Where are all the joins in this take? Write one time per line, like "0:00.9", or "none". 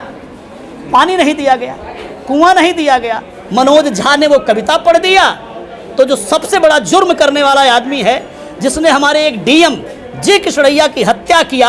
0:03.3

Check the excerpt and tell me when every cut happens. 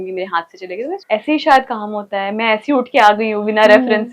0:01.0

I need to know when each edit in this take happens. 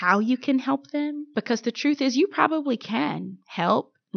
0:01.2

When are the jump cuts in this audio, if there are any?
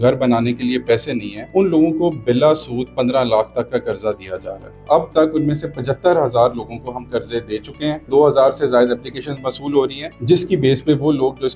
0:01.3
0:04.8
0:08.1
0:10.1

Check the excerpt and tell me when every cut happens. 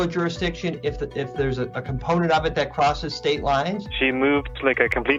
none

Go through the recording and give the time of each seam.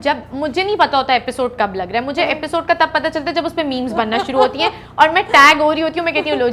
none

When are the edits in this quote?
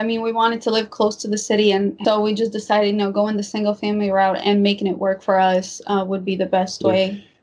0:02.0

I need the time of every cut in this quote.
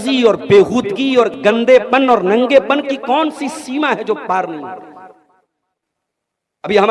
none

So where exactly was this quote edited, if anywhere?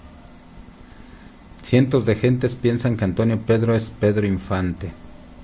0:01.1

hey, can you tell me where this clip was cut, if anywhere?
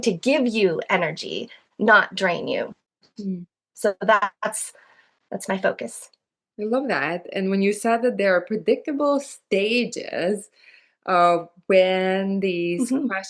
none

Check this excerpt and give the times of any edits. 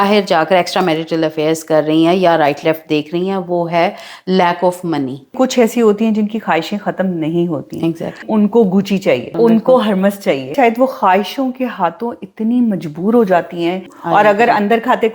0:05.4
0:08.2
0:09.3
0:10.5
0:13.9

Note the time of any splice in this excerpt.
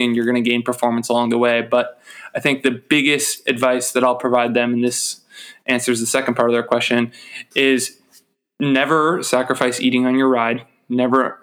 none

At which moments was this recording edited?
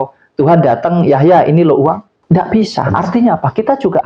0:02.1

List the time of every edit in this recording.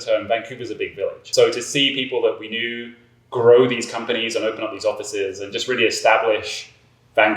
0:01.2

